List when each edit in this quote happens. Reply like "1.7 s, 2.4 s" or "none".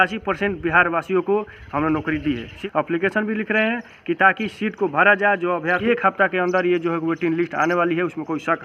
2.6 s, 5.8 s

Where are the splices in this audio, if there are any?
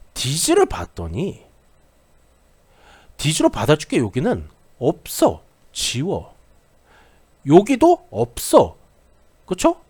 none

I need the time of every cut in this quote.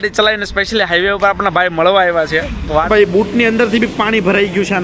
2.9 s

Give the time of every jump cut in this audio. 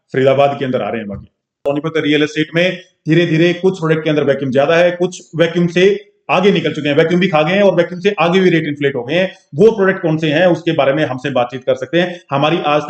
1.6 s

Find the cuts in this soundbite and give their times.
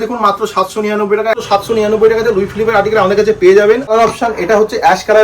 1.4 s, 3.9 s

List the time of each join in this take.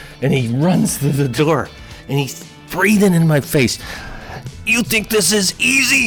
3.8 s

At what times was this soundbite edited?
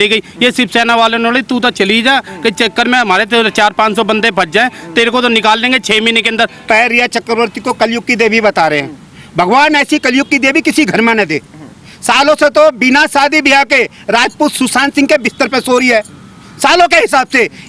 6.7 s

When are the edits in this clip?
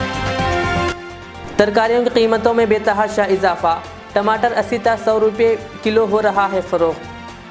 0.9 s

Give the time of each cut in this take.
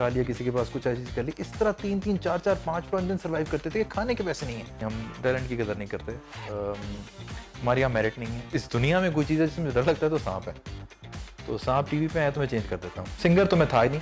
4.8 s, 8.4 s, 13.0 s

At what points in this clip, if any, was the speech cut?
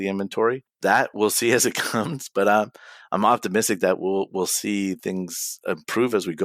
1.0 s

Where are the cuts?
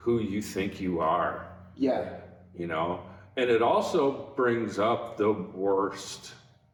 none

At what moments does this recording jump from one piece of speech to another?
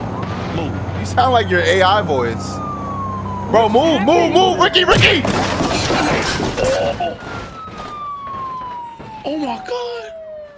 none

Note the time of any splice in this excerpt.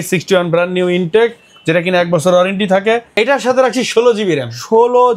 3.1 s

